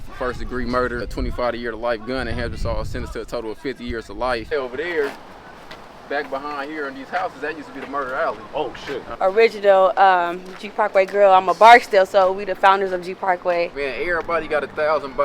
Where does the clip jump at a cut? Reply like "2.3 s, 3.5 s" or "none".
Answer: 1.1 s, 4.5 s, 9.1 s, 13.7 s